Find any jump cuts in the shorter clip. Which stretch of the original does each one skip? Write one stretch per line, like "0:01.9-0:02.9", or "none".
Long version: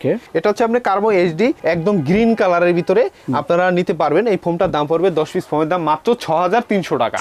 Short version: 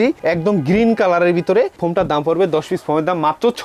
0:03.2-0:04.4

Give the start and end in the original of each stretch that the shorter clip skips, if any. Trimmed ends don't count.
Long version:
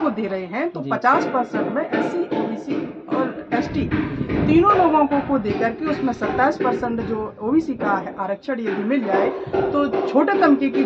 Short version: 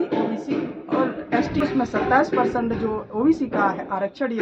0:03.8-0:05.9

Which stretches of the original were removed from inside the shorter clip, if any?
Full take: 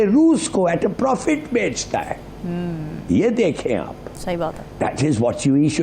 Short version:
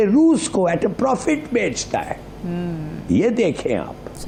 none

